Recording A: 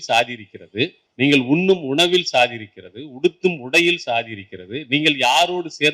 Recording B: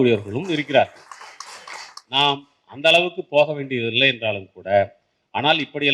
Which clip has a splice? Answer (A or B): A